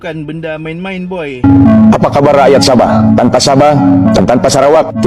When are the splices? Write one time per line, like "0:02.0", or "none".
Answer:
0:01.4